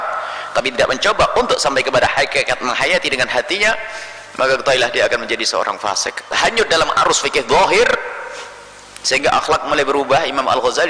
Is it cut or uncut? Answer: cut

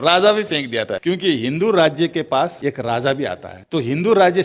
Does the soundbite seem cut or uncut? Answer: cut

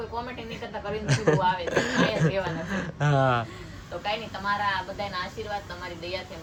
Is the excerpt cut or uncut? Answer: uncut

